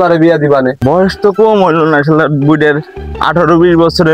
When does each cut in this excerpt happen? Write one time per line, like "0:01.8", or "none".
0:01.0